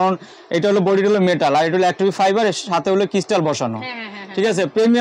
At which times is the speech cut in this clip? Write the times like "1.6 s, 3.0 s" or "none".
none